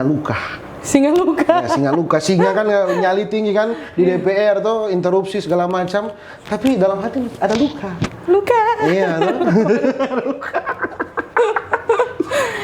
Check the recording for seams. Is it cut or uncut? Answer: uncut